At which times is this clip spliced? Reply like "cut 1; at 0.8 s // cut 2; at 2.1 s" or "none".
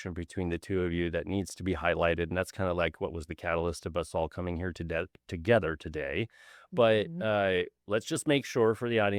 none

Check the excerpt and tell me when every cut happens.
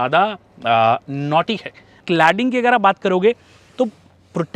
cut 1; at 2.0 s

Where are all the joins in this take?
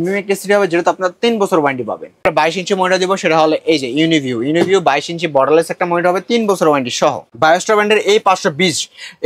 cut 1; at 2.2 s // cut 2; at 7.2 s

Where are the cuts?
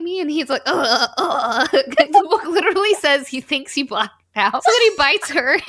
cut 1; at 2.0 s // cut 2; at 4.6 s

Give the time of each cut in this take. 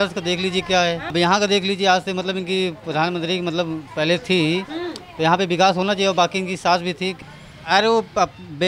cut 1; at 1.1 s // cut 2; at 7.1 s

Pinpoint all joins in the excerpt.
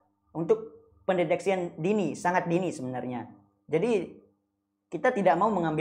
none

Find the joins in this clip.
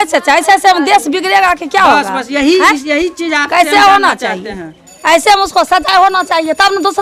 none

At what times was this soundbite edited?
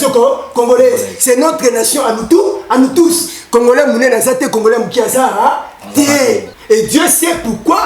cut 1; at 6.5 s

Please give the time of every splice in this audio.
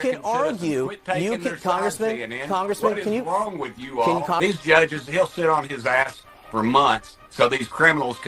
cut 1; at 4.3 s

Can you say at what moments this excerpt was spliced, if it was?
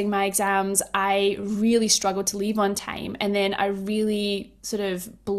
none

